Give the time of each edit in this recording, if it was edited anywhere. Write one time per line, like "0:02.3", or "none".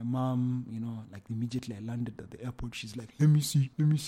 none